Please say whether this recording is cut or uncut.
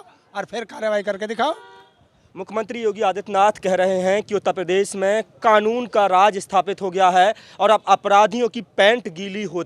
cut